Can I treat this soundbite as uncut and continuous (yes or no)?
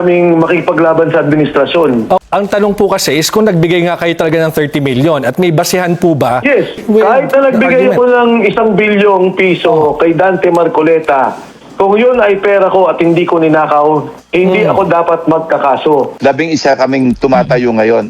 no